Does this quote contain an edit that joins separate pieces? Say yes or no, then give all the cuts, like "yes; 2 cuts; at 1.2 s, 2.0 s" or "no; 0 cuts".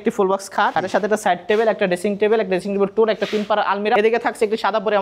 yes; 2 cuts; at 0.7 s, 4.0 s